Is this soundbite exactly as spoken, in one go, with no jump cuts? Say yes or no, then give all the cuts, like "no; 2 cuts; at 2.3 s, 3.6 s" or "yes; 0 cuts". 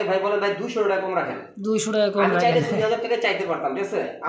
yes; 0 cuts